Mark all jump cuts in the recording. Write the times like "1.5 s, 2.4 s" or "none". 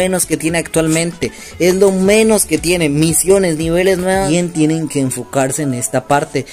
4.3 s